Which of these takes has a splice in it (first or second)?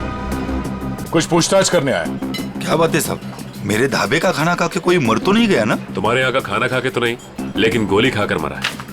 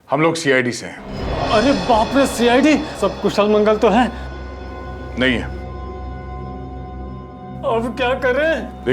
first